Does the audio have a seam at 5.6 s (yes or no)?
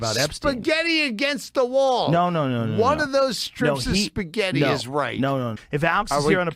yes